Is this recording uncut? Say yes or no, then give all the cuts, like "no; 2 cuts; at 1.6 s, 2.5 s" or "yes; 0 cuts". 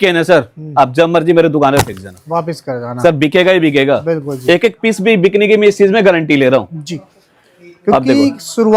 yes; 0 cuts